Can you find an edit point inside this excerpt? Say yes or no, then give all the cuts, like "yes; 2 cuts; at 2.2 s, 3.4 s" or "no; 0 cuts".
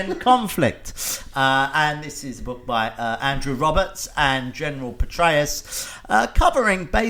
no; 0 cuts